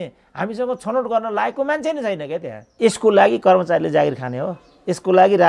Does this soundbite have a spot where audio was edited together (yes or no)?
yes